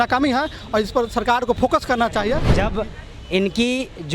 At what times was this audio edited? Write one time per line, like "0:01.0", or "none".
0:02.5